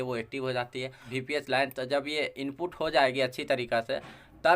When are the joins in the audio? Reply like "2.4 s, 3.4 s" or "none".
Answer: 1.0 s